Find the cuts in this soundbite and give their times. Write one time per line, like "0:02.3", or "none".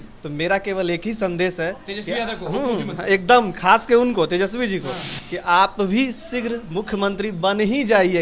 none